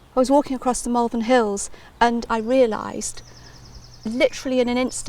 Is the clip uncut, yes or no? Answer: no